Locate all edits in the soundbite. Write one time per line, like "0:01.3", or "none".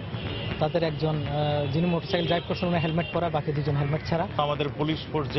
0:04.4